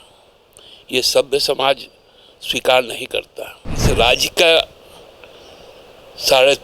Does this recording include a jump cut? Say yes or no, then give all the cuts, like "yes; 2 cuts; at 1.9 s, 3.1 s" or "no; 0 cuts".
yes; 1 cut; at 3.9 s